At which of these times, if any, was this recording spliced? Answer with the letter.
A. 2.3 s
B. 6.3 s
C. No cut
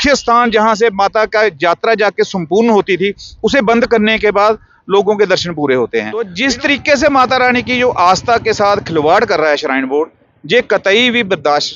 B